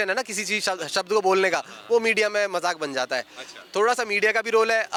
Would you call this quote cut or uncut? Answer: uncut